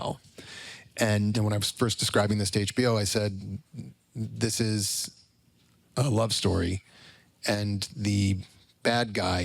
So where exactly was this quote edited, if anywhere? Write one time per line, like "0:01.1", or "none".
0:01.3